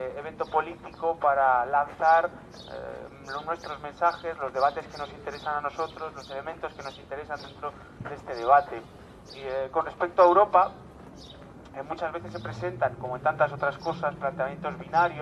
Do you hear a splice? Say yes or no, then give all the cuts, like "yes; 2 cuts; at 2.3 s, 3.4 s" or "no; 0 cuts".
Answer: yes; 1 cut; at 7.3 s